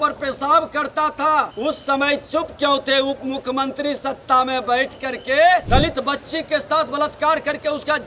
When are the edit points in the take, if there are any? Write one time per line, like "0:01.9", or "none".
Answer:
0:01.5
0:05.6